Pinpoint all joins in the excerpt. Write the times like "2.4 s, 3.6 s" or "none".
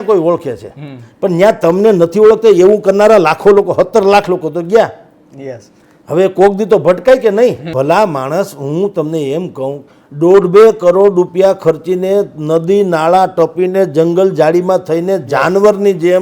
7.6 s